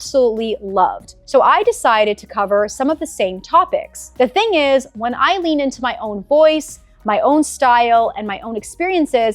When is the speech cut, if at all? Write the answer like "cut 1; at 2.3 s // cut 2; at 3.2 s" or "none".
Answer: cut 1; at 1.1 s // cut 2; at 4.0 s